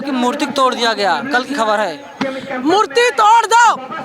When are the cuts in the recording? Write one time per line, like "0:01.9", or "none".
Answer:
none